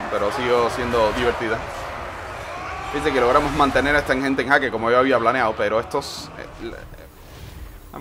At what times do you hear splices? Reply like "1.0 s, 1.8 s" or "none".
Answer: 6.7 s